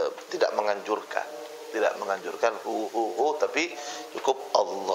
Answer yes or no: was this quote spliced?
no